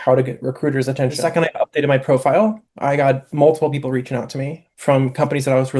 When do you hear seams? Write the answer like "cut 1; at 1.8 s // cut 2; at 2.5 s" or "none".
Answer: cut 1; at 1.2 s